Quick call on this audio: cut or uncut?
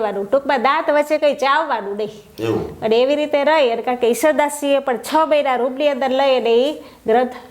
uncut